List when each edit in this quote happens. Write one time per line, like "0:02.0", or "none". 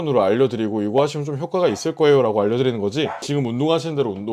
0:03.2